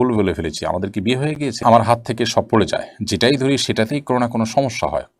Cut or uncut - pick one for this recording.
cut